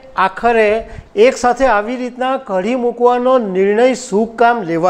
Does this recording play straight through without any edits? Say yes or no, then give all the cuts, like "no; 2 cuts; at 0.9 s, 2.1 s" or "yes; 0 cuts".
yes; 0 cuts